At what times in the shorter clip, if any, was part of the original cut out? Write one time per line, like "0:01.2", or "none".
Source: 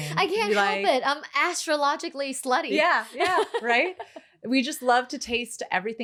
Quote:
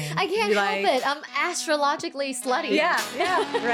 none